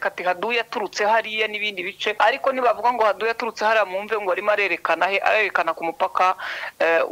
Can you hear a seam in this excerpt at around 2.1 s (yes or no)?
yes